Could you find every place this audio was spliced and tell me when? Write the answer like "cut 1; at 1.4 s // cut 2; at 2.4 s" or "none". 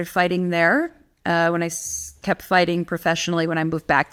none

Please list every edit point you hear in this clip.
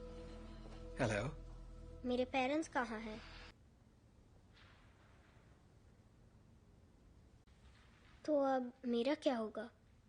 cut 1; at 3.6 s

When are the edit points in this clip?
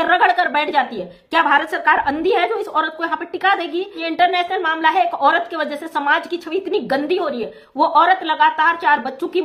cut 1; at 4.0 s

